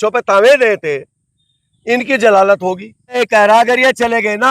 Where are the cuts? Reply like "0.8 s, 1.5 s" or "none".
3.2 s

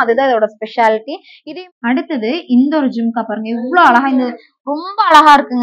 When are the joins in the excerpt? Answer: 1.3 s

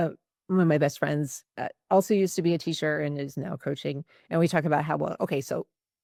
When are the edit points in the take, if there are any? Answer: none

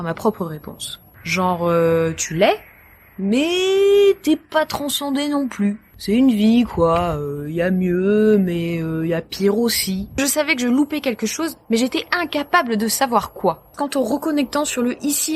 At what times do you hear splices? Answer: 10.1 s, 13.7 s

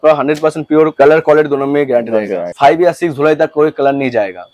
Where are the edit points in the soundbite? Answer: 2.5 s

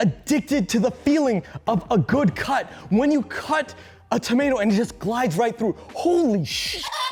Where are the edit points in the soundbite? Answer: none

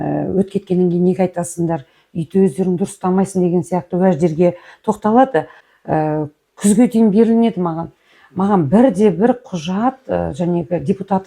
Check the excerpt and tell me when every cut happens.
5.6 s

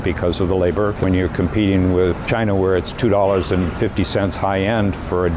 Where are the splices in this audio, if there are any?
0.9 s, 2.2 s

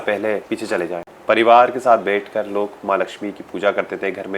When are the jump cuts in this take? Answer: 1.0 s

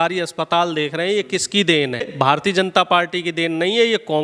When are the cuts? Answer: 2.1 s

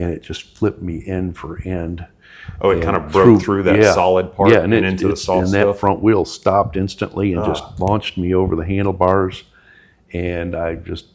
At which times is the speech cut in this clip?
none

